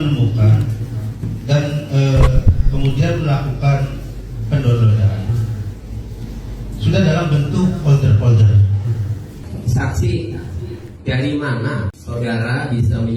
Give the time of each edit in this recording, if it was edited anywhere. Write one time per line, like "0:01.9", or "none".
0:09.4
0:12.0